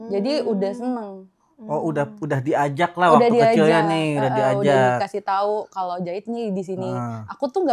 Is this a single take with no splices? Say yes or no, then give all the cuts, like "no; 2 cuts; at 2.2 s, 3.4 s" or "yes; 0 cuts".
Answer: yes; 0 cuts